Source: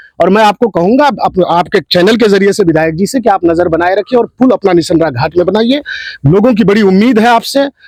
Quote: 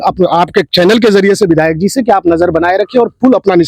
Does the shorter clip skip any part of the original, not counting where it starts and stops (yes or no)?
no